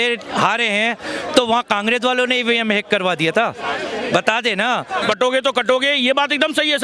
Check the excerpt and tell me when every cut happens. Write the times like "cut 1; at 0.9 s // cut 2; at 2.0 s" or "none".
cut 1; at 5.0 s